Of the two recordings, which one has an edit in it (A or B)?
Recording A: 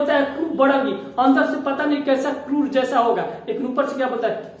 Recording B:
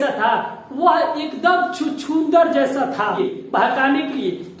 B